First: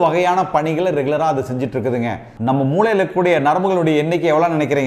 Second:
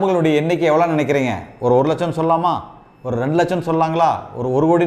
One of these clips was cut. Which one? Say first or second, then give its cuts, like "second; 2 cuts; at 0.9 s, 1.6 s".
first; 1 cut; at 2.3 s